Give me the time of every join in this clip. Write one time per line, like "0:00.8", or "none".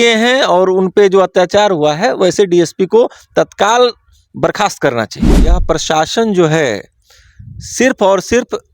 0:05.6